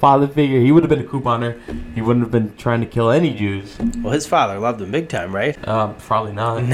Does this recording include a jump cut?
yes; 1 cut; at 5.6 s

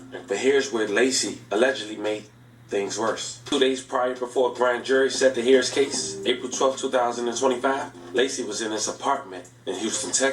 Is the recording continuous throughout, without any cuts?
no; 1 cut; at 3.4 s

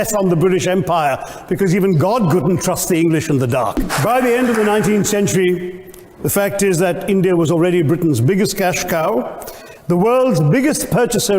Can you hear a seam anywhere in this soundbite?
yes; 1 cut; at 3.9 s

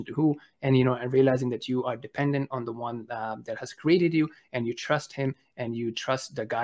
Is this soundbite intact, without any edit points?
yes; 0 cuts

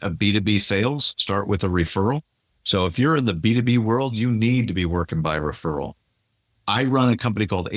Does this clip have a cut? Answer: no; 0 cuts

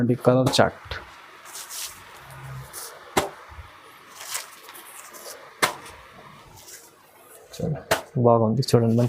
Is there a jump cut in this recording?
no; 0 cuts

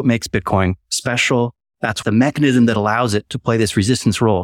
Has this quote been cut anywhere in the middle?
yes; 1 cut; at 2.0 s

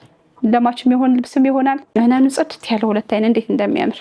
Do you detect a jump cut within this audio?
no; 0 cuts

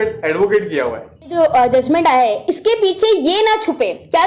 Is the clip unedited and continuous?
no; 1 cut; at 1.3 s

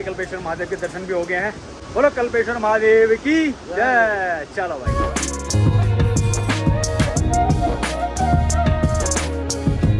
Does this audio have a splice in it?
no; 0 cuts

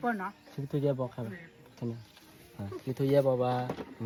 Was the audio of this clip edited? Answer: no; 0 cuts

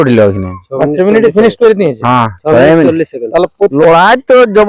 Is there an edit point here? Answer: yes; 1 cut; at 3.7 s

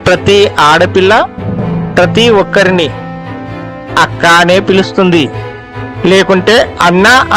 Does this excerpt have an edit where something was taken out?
no; 0 cuts

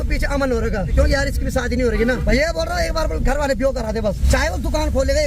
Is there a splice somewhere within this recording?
yes; 3 cuts; at 0.9 s, 2.2 s, 4.2 s

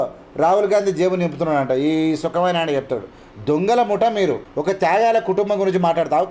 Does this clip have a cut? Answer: no; 0 cuts

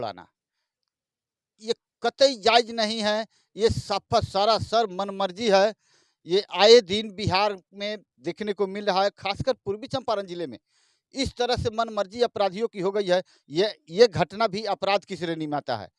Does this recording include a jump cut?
no; 0 cuts

